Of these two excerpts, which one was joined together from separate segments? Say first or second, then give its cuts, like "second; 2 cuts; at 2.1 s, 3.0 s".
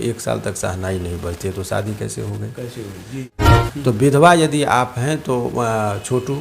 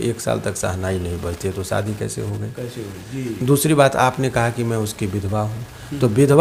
first; 1 cut; at 3.3 s